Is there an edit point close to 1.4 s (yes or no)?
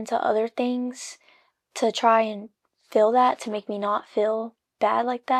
no